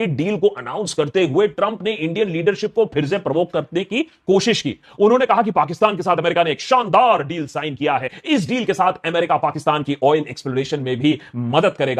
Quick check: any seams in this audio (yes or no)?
no